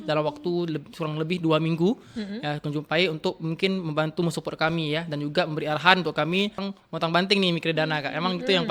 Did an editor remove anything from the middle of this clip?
yes; 1 cut; at 6.6 s

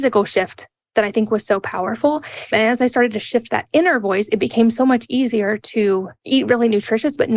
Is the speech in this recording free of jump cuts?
no; 2 cuts; at 2.5 s, 6.1 s

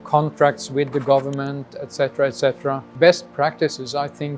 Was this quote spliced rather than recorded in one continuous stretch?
yes; 1 cut; at 2.9 s

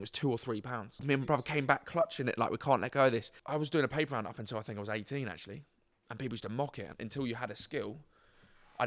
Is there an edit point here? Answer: yes; 3 cuts; at 1.0 s, 3.3 s, 7.0 s

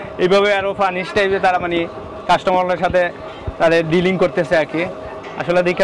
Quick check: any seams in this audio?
no; 0 cuts

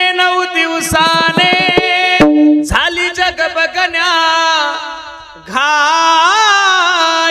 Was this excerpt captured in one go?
no; 1 cut; at 2.6 s

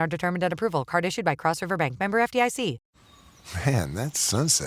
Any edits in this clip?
yes; 1 cut; at 2.9 s

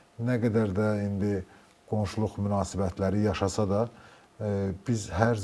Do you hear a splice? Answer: no; 0 cuts

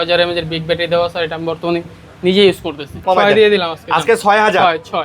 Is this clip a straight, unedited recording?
no; 1 cut; at 3.0 s

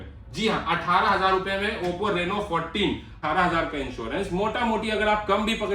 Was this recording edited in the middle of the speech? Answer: yes; 1 cut; at 3.2 s

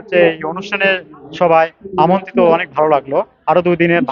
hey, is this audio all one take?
yes; 0 cuts

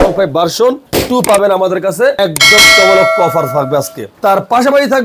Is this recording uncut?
yes; 0 cuts

